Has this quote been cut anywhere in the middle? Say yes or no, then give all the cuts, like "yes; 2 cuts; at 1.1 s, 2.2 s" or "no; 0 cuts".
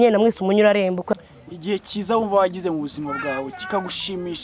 yes; 1 cut; at 1.1 s